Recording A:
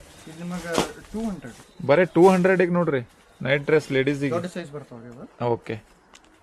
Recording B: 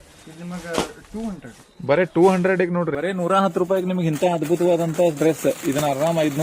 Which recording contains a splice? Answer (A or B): B